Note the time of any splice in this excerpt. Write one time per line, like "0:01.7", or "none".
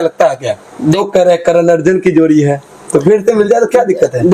0:01.0